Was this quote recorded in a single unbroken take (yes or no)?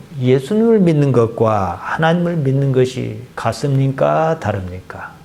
yes